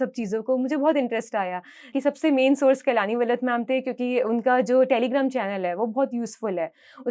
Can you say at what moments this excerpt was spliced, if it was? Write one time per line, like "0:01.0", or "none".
0:01.9